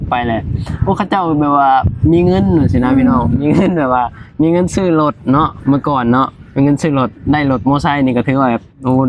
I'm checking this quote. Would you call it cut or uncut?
uncut